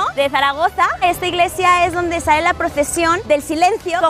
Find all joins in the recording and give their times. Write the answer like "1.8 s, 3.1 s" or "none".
1.0 s, 3.2 s